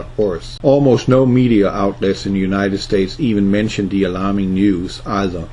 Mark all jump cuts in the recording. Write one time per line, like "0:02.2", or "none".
none